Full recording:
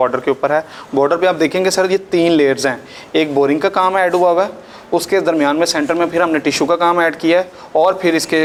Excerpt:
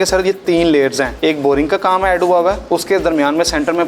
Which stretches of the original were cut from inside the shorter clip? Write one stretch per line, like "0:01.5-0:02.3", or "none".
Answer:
0:02.7-0:03.0
0:04.5-0:04.8